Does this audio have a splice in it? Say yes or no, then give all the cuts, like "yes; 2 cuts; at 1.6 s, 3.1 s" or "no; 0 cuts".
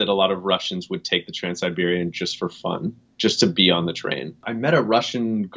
yes; 1 cut; at 4.5 s